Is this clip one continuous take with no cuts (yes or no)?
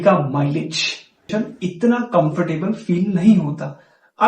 no